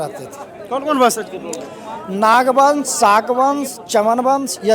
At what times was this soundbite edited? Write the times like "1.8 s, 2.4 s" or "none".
none